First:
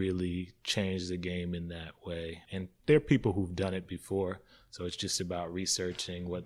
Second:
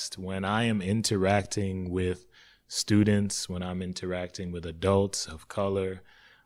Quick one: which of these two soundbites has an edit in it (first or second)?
first